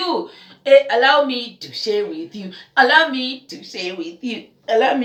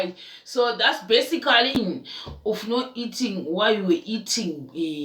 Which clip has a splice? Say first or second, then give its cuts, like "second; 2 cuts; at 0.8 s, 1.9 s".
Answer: second; 1 cut; at 1.7 s